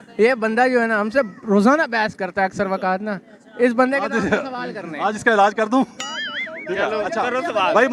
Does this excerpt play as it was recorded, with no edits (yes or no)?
yes